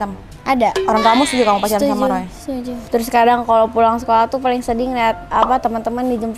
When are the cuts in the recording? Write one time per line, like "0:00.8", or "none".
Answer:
0:02.8